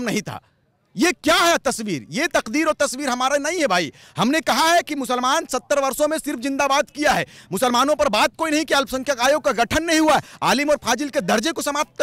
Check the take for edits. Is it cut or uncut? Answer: uncut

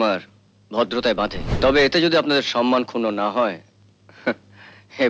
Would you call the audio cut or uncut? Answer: cut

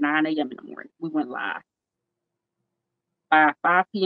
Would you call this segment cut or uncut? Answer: uncut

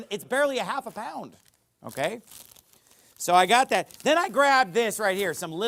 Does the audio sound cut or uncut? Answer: uncut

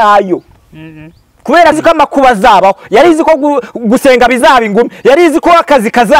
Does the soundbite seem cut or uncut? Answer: cut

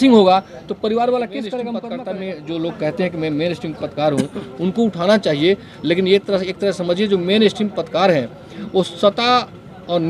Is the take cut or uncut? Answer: cut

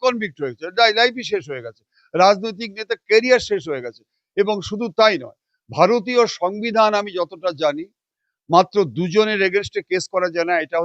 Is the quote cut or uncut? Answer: uncut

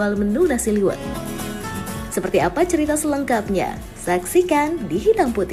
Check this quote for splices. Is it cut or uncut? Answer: uncut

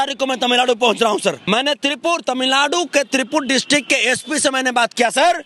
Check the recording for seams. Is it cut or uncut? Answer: cut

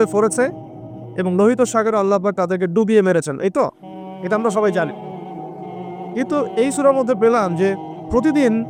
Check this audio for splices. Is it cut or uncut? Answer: uncut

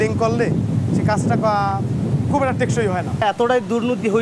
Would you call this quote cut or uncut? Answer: cut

